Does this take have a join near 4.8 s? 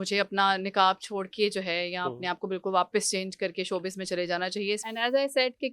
yes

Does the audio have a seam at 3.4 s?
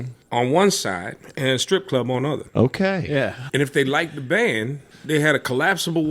yes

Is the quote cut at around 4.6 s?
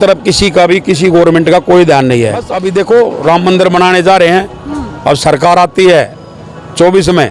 no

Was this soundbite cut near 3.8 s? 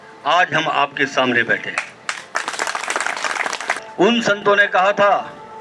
yes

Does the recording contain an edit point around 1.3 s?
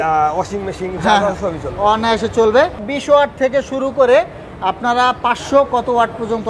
no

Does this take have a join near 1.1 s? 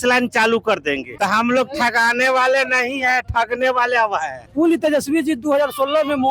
yes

